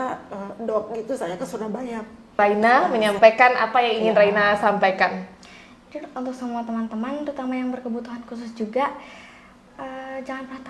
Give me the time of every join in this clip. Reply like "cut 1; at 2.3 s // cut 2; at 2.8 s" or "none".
cut 1; at 2.3 s